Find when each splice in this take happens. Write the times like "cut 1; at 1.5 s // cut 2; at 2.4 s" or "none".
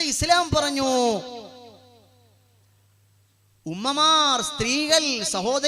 none